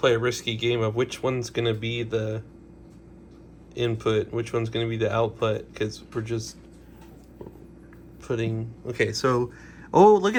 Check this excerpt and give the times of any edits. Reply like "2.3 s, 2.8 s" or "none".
none